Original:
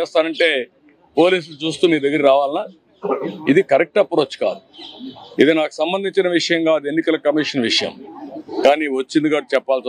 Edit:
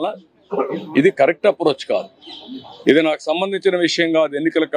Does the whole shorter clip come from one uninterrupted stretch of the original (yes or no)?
yes